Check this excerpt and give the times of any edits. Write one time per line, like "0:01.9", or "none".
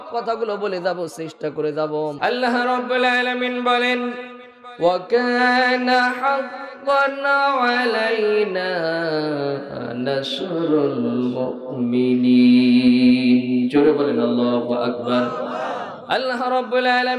0:02.2